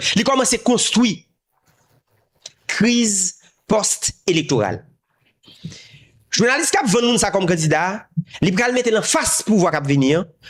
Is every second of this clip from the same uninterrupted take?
yes; 0 cuts

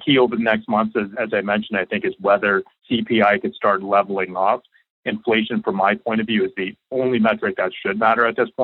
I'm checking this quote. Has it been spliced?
yes; 2 cuts; at 1.1 s, 2.7 s

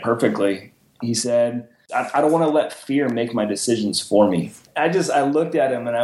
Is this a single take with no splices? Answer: no; 2 cuts; at 1.8 s, 4.6 s

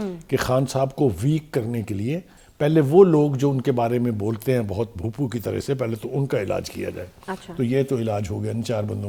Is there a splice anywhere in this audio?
no; 0 cuts

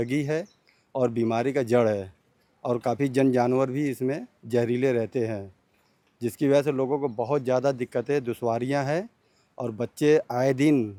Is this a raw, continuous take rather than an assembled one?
yes; 0 cuts

